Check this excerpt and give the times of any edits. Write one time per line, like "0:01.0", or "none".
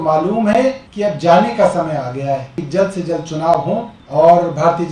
0:00.9
0:02.6
0:04.0